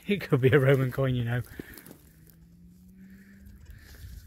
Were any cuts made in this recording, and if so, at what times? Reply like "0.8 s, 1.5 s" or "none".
none